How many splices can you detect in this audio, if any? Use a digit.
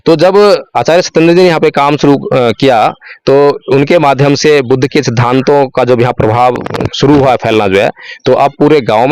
1